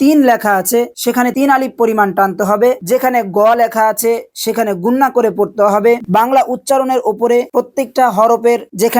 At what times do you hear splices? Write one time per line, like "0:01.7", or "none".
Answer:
0:02.8
0:06.0